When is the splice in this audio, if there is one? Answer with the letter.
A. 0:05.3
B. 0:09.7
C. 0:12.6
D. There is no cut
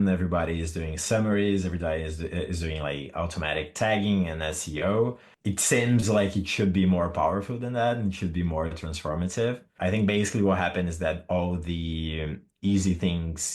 A